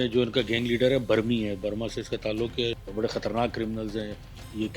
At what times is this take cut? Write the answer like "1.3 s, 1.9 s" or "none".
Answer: 2.8 s